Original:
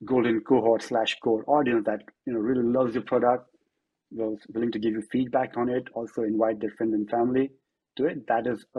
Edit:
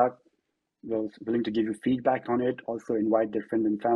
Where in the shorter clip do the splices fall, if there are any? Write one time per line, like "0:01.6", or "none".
none